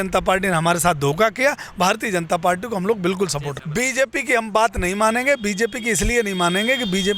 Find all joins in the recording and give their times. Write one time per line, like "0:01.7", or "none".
0:03.6